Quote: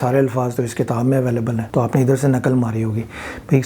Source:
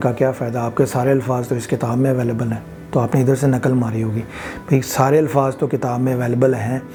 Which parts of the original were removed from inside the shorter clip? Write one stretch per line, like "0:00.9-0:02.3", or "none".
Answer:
0:02.6-0:02.8